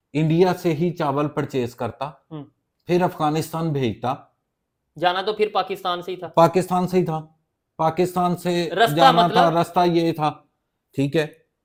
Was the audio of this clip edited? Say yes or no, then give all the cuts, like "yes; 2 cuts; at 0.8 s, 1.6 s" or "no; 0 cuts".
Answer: no; 0 cuts